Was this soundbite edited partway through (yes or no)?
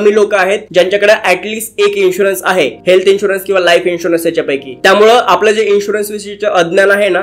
no